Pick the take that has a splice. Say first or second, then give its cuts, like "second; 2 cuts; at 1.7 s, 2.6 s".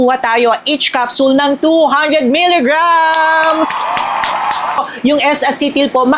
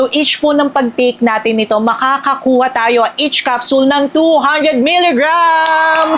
first; 1 cut; at 4.8 s